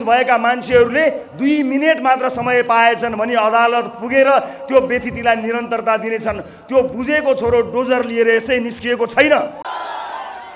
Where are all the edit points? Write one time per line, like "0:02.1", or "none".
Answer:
none